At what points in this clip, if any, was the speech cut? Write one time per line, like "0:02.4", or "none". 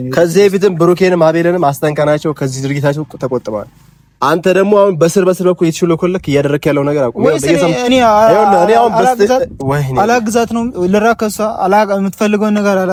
none

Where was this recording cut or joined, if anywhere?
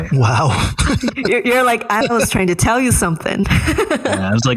0:02.0

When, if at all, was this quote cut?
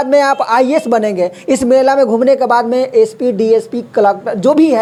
none

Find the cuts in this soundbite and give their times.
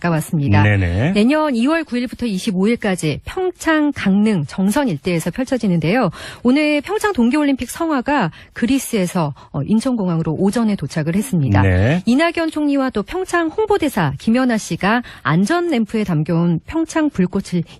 none

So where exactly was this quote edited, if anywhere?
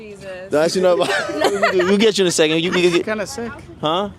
0:01.4

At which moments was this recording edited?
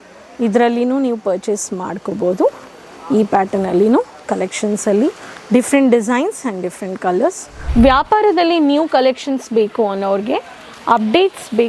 0:07.5

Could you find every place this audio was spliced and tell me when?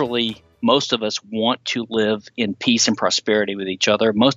none

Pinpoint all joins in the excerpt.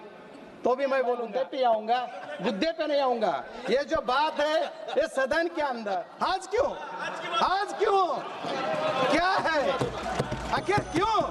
0:01.3
0:06.1

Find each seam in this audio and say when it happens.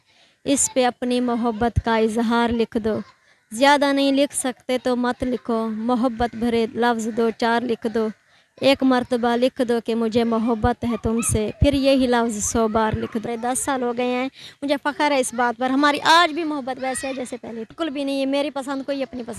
0:13.3
0:17.7

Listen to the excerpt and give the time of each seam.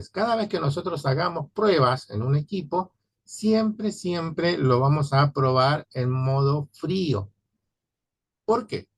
none

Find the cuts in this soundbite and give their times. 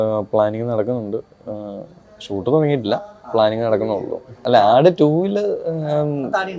0:04.4

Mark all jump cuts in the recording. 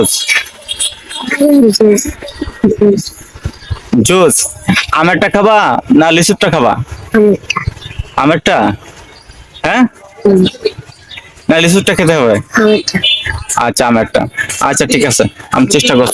none

